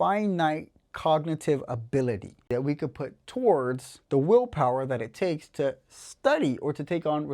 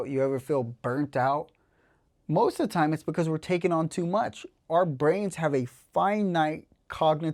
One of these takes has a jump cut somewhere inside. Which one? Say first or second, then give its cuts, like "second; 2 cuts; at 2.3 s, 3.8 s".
first; 1 cut; at 2.5 s